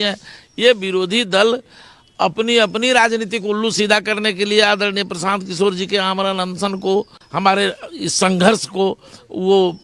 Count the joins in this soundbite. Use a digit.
1